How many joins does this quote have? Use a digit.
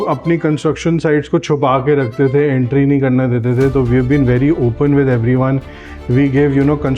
0